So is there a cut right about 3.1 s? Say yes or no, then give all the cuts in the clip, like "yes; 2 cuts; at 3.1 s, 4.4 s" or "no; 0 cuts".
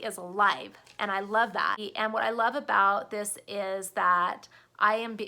no; 1 cut; at 1.8 s